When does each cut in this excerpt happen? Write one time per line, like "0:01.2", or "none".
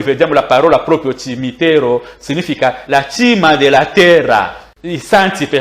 0:04.7